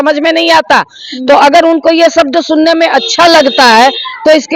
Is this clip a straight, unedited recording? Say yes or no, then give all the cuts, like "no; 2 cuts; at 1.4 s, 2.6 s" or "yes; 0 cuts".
yes; 0 cuts